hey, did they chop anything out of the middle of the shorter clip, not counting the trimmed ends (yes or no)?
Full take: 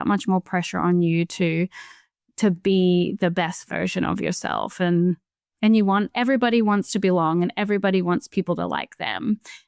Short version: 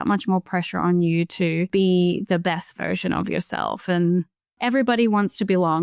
yes